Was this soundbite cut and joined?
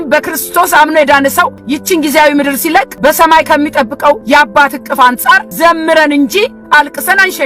yes; 4 cuts; at 1.6 s, 2.9 s, 4.2 s, 5.5 s

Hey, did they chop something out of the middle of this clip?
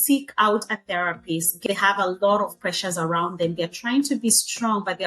yes; 1 cut; at 1.6 s

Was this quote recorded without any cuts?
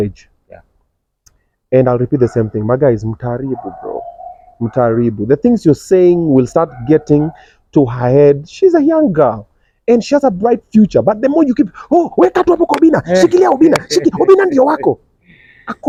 yes; 0 cuts

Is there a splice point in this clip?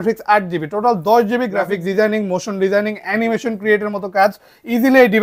yes; 1 cut; at 1.7 s

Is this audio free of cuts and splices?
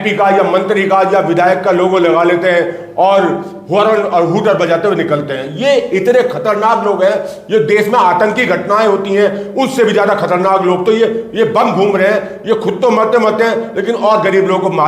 yes; 0 cuts

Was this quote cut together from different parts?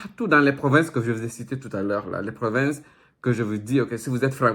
no; 0 cuts

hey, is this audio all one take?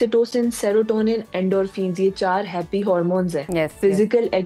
yes; 0 cuts

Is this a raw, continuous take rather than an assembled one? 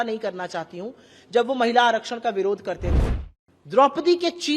no; 1 cut; at 3.0 s

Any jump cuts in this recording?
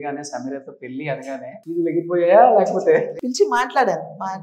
yes; 2 cuts; at 1.6 s, 3.1 s

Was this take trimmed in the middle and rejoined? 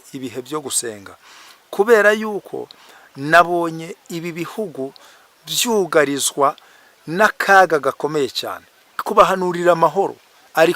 yes; 1 cut; at 9.0 s

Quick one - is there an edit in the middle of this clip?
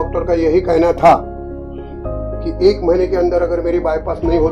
no; 0 cuts

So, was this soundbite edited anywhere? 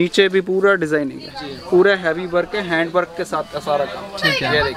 no; 0 cuts

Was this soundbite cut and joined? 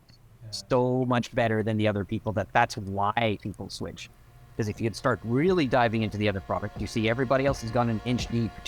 no; 0 cuts

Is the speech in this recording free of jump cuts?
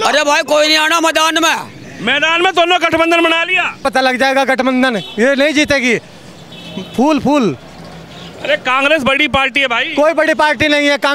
no; 1 cut; at 3.8 s

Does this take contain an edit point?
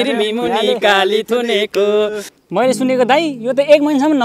yes; 1 cut; at 2.2 s

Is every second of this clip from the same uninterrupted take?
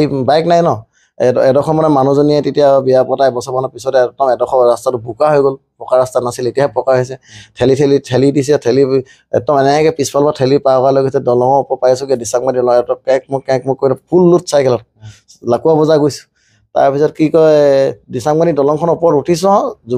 yes; 0 cuts

